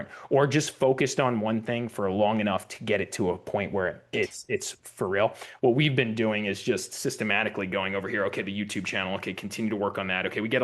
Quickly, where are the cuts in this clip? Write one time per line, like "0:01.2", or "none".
0:04.1